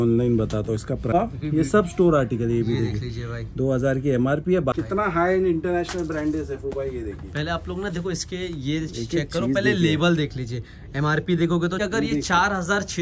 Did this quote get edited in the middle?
yes; 3 cuts; at 1.1 s, 4.7 s, 11.8 s

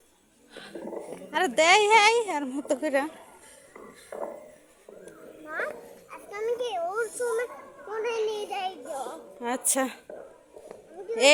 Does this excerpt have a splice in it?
no; 0 cuts

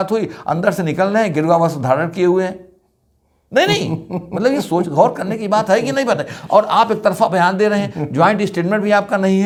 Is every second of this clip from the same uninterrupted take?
yes; 0 cuts

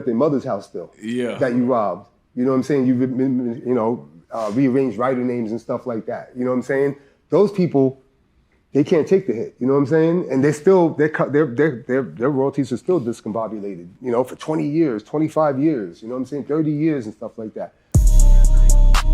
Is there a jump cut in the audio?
yes; 1 cut; at 17.7 s

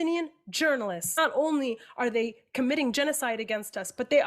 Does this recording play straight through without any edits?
no; 1 cut; at 1.2 s

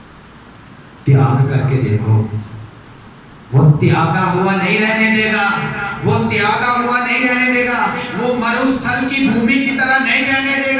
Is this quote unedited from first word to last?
yes; 0 cuts

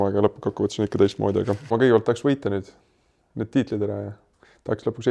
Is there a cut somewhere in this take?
yes; 1 cut; at 1.7 s

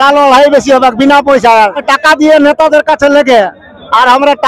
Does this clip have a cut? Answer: yes; 1 cut; at 1.9 s

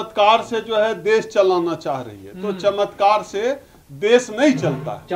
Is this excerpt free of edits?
yes; 0 cuts

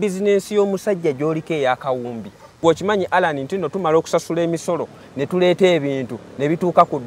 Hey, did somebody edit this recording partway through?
yes; 1 cut; at 2.5 s

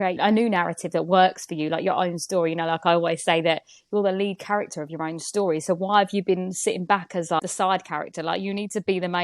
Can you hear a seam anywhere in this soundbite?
yes; 1 cut; at 7.4 s

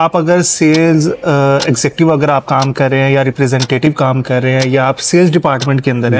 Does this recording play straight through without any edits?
yes; 0 cuts

